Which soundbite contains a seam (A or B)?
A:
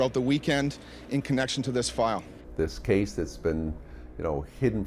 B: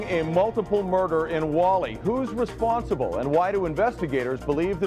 A